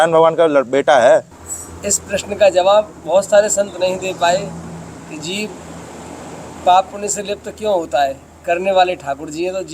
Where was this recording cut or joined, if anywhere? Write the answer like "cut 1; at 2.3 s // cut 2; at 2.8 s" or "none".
cut 1; at 1.3 s